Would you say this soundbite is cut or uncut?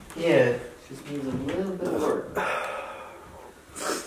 uncut